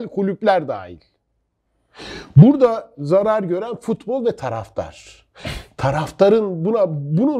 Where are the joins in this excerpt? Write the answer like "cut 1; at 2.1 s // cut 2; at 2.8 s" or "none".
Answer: none